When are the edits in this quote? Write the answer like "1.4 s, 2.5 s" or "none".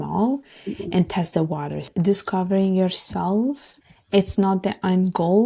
1.9 s, 3.7 s